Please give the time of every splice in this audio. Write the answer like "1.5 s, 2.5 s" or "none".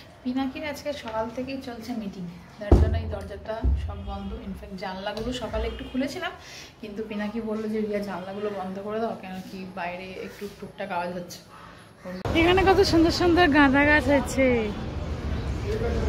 12.2 s